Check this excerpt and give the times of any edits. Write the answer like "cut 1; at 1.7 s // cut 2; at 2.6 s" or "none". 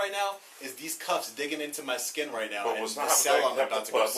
none